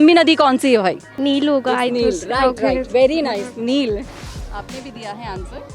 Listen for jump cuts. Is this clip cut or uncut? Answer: cut